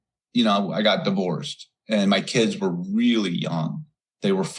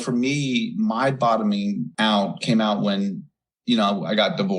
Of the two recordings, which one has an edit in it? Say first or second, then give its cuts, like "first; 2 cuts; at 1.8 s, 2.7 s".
second; 1 cut; at 1.9 s